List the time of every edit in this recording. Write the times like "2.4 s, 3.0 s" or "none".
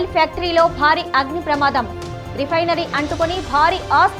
none

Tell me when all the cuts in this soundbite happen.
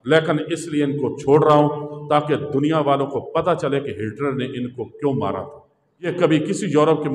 6.1 s

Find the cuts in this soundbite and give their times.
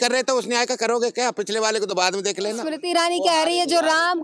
2.7 s

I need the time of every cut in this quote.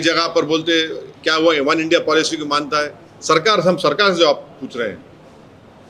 none

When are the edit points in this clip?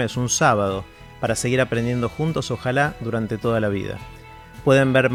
none

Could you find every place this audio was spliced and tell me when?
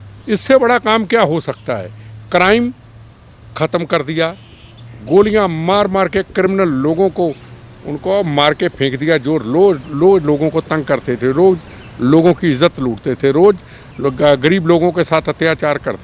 none

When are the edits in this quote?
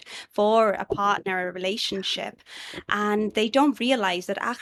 none

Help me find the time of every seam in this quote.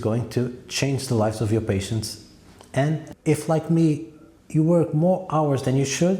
3.1 s

